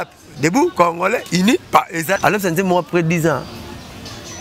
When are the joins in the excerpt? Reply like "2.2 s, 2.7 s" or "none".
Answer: 2.2 s